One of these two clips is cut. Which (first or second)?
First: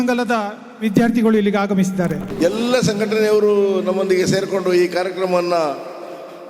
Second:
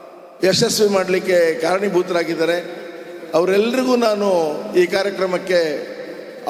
first